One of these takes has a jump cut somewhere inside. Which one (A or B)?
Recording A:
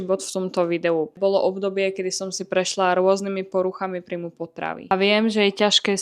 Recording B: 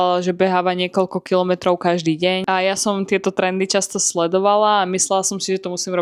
A